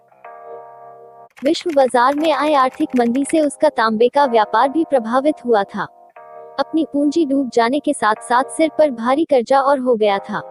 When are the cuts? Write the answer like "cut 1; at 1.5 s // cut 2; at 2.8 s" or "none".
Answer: cut 1; at 1.4 s